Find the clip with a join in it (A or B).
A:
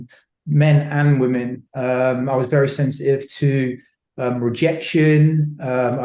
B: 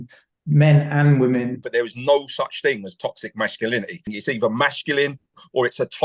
B